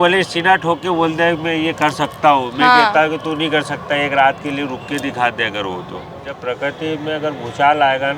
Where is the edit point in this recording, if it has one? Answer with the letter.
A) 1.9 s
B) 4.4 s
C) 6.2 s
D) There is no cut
C